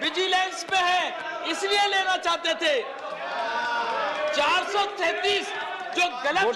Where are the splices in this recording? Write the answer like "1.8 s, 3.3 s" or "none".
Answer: none